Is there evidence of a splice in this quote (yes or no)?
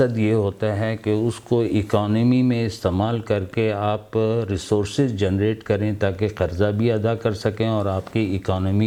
no